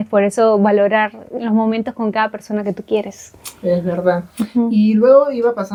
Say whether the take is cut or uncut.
uncut